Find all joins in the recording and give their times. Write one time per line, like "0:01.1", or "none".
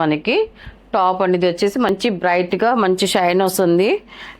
0:01.9